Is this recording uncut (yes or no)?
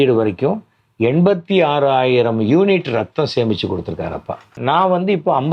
no